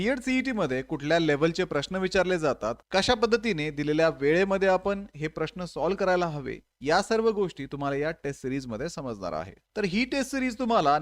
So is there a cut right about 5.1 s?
no; 1 cut; at 9.6 s

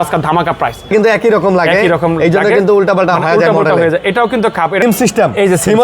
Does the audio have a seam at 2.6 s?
no; 2 cuts; at 0.9 s, 4.8 s

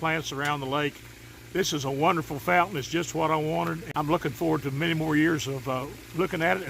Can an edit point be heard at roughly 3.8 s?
yes; 1 cut; at 3.8 s

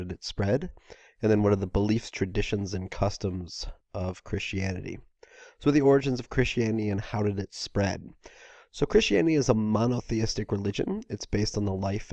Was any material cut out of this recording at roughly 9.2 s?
yes; 1 cut; at 9.2 s

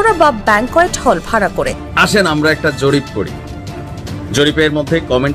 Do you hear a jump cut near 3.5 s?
no; 1 cut; at 1.9 s

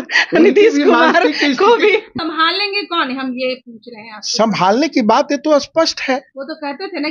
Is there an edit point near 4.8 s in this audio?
no; 1 cut; at 2.2 s

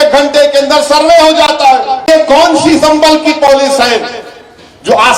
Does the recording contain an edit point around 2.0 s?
yes; 1 cut; at 2.0 s

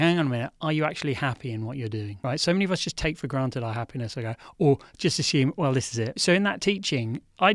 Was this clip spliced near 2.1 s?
yes; 2 cuts; at 2.1 s, 6.2 s

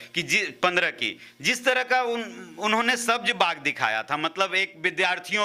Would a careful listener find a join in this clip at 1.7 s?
no; 0 cuts

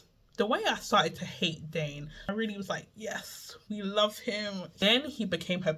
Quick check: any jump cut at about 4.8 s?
yes; 2 cuts; at 2.3 s, 4.8 s

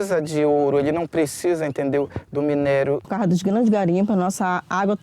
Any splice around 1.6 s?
no; 1 cut; at 3.1 s

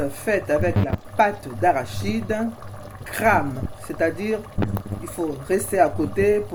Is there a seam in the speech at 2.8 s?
no; 0 cuts

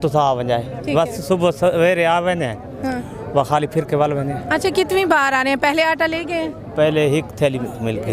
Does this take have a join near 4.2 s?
no; 0 cuts

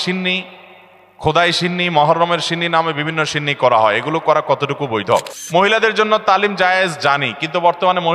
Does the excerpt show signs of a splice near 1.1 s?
no; 1 cut; at 5.4 s

